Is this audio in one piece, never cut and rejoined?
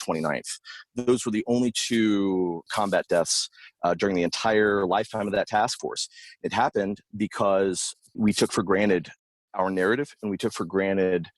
no; 3 cuts; at 0.9 s, 2.7 s, 8.2 s

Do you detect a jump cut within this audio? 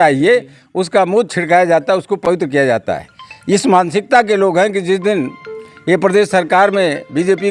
no; 0 cuts

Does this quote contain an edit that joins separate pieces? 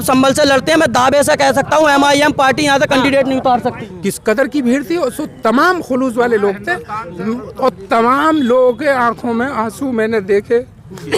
yes; 1 cut; at 3.9 s

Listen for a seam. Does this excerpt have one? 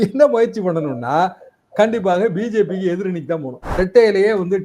yes; 1 cut; at 3.6 s

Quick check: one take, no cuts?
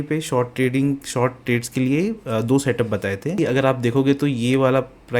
no; 1 cut; at 3.4 s

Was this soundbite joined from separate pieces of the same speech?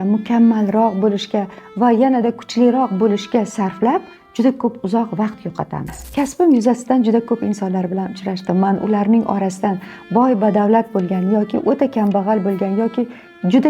yes; 1 cut; at 5.9 s

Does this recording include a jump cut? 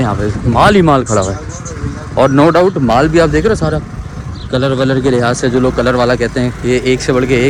no; 0 cuts

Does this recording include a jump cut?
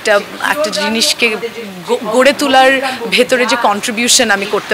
no; 0 cuts

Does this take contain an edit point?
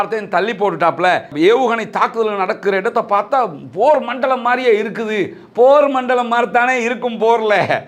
yes; 1 cut; at 1.3 s

